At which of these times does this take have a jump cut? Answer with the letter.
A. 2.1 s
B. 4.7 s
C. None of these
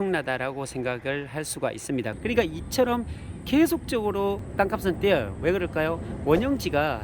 A